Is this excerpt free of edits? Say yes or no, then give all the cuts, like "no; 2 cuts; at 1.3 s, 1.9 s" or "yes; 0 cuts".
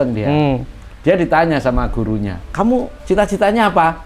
no; 2 cuts; at 2.4 s, 3.0 s